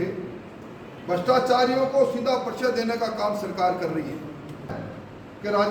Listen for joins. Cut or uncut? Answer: cut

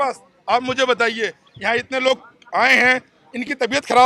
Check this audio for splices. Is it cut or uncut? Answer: uncut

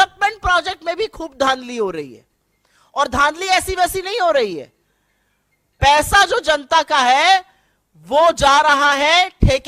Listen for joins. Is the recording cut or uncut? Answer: uncut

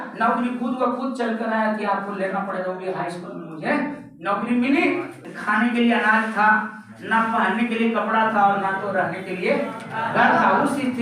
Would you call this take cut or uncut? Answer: cut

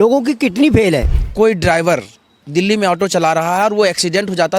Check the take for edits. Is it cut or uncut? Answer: cut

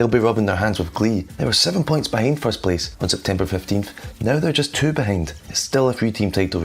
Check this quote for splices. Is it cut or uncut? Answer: cut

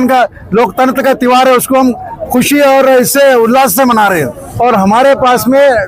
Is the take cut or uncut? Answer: cut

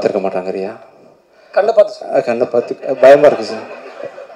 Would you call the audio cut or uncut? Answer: uncut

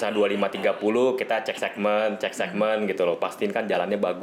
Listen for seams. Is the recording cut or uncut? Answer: uncut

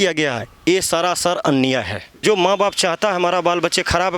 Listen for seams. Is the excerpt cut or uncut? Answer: cut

